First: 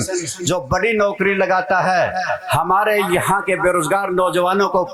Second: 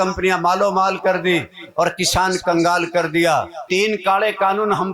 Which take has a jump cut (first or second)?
second